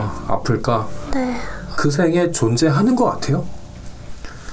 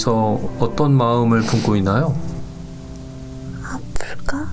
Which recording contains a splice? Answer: first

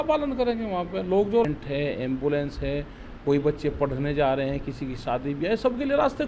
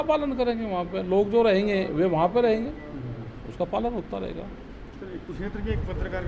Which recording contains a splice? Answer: first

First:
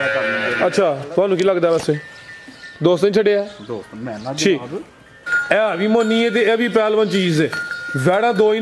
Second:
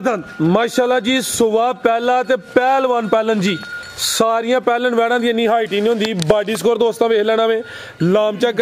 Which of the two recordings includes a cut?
first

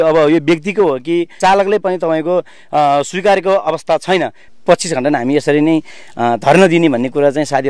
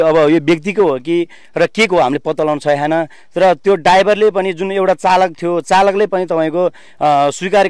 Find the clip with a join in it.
first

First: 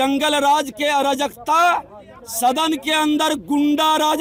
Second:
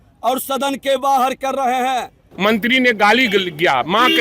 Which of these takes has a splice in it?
second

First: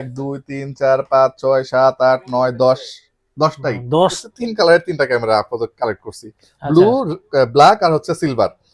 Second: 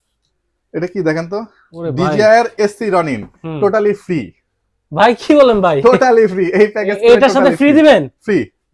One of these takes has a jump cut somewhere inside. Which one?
first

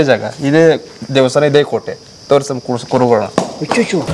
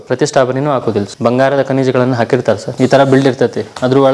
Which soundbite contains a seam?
second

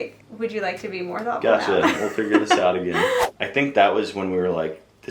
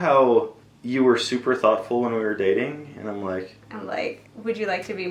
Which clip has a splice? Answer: first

